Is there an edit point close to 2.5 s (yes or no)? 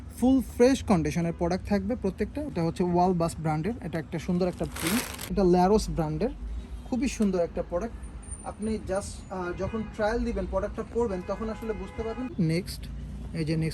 yes